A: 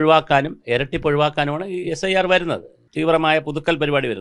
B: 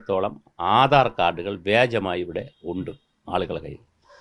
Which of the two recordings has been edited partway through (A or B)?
A